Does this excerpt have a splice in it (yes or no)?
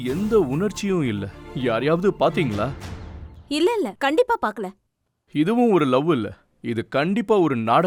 no